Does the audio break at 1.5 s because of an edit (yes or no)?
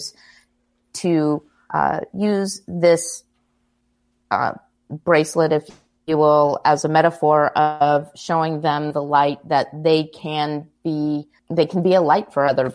no